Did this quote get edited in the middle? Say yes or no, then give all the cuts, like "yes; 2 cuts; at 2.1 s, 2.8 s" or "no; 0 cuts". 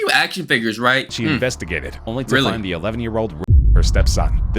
yes; 1 cut; at 1.1 s